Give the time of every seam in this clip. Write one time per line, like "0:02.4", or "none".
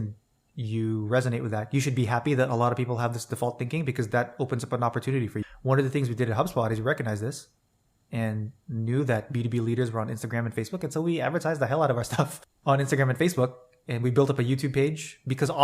0:12.5